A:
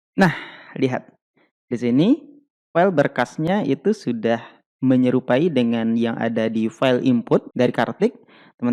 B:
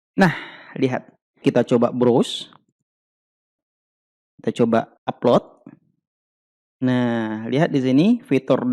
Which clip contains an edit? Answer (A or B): B